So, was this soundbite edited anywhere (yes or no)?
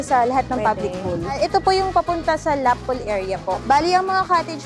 yes